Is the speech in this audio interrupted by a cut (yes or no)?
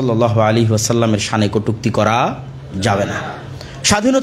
no